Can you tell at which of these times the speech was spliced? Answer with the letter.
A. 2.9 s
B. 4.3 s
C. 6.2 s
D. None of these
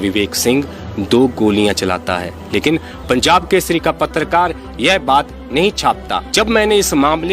C